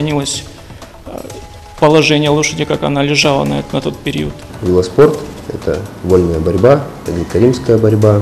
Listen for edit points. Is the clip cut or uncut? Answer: cut